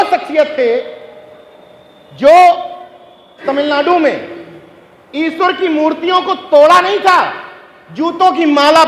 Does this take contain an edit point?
yes; 1 cut; at 3.3 s

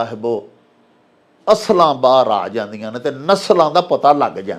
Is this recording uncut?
yes; 0 cuts

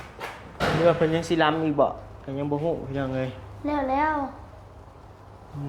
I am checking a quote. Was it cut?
no; 0 cuts

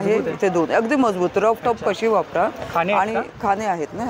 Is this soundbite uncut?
yes; 0 cuts

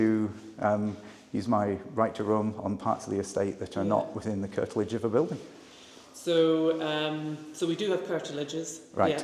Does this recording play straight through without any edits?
yes; 0 cuts

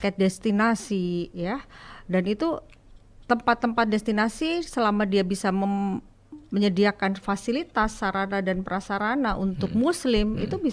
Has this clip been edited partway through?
no; 0 cuts

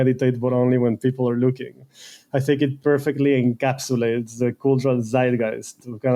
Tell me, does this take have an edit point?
no; 0 cuts

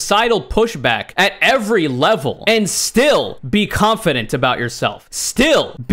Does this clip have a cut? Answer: no; 0 cuts

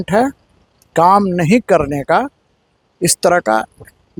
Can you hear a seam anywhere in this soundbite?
no; 0 cuts

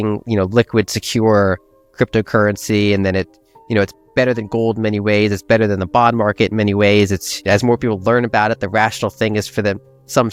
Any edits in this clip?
no; 0 cuts

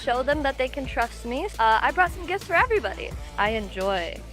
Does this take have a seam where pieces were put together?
yes; 2 cuts; at 1.5 s, 3.2 s

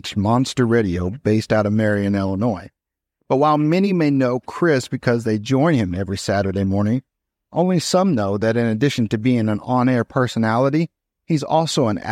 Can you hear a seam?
no; 0 cuts

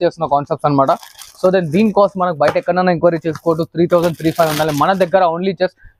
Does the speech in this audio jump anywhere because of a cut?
no; 0 cuts

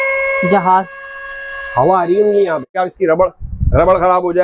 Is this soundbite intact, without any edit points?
no; 1 cut; at 2.8 s

